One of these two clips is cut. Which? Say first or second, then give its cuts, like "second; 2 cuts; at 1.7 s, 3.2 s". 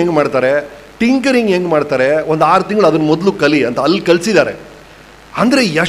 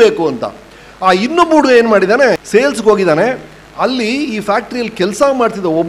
second; 1 cut; at 2.4 s